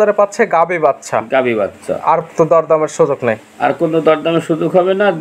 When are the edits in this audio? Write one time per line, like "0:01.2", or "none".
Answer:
none